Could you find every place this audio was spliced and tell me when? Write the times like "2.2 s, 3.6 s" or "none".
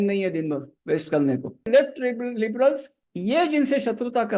1.6 s